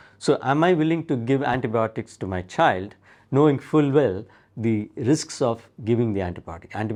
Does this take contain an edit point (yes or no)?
no